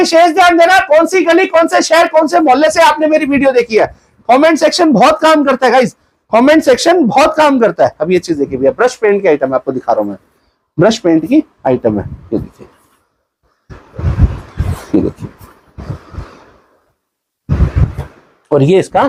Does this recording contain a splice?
no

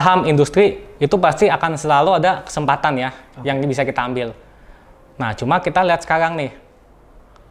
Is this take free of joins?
yes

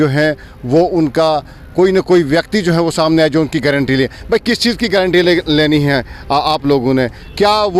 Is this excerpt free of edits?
yes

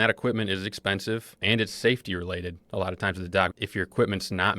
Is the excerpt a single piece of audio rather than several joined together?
no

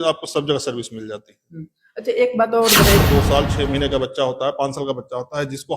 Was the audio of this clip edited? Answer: yes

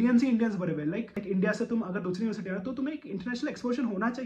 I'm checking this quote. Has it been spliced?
yes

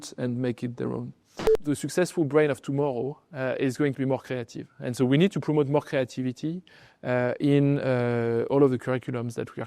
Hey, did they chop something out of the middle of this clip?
yes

